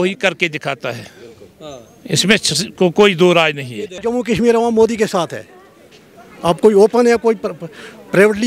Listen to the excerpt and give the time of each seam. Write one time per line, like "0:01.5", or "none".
0:04.0